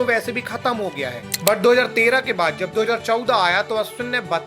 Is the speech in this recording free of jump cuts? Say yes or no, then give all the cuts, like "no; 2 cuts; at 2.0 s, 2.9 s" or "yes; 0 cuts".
no; 1 cut; at 1.2 s